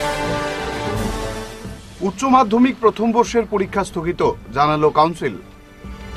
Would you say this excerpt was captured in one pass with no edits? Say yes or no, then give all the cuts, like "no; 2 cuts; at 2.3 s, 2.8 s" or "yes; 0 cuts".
no; 1 cut; at 1.0 s